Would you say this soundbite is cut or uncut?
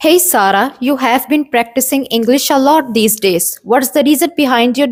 uncut